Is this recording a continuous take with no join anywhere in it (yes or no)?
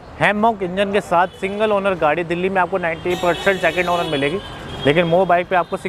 yes